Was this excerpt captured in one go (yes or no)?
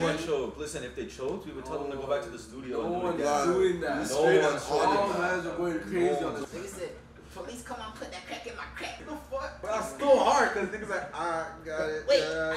no